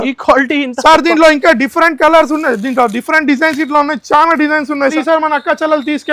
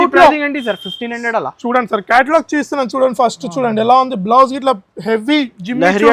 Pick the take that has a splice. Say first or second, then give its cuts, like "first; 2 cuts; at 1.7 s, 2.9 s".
first; 1 cut; at 4.9 s